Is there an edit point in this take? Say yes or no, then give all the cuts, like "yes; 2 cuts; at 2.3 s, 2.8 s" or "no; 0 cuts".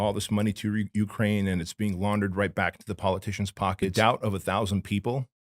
yes; 1 cut; at 3.9 s